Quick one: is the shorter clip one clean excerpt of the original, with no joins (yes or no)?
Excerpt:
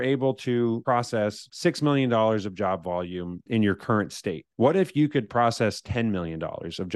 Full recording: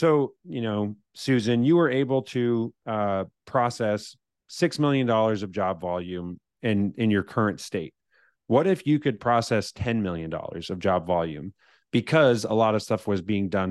no